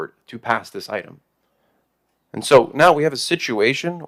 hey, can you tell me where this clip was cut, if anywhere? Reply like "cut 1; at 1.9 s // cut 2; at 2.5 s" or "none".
none